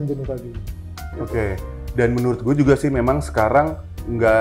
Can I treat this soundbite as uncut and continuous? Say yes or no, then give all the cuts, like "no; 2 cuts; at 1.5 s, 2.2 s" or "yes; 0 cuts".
yes; 0 cuts